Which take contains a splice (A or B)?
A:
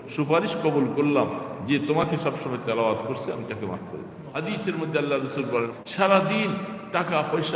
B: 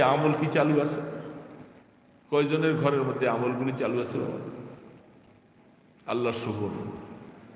A